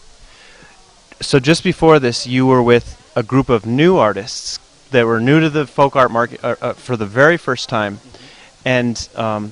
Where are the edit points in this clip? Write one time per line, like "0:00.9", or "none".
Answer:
none